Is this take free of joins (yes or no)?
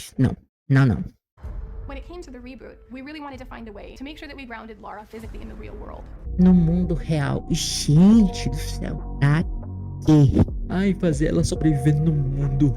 yes